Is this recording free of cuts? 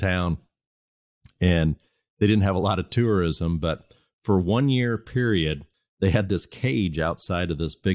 no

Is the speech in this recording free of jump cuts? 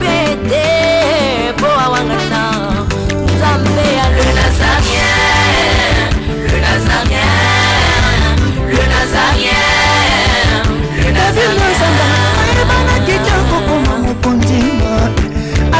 yes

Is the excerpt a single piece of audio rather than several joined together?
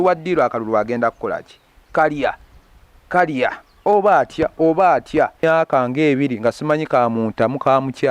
no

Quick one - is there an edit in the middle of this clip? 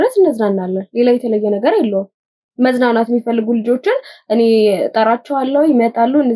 no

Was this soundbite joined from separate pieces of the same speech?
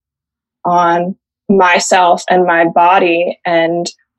no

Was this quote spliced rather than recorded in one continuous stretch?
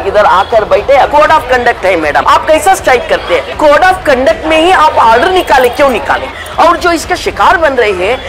yes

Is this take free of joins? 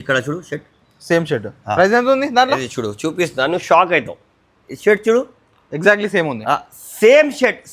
yes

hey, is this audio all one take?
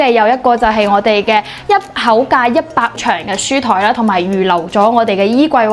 no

